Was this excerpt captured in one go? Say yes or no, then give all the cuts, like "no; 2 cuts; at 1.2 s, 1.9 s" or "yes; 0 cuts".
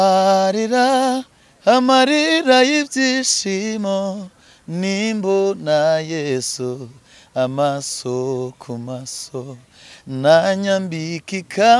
yes; 0 cuts